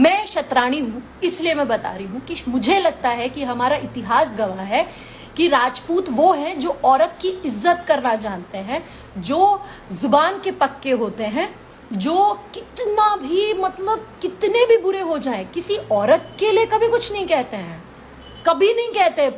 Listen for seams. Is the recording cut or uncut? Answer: uncut